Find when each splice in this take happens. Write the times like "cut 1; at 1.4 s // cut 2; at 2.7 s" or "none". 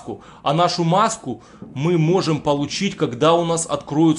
none